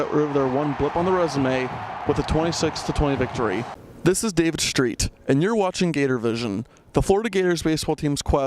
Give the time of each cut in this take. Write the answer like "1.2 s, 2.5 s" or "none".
3.9 s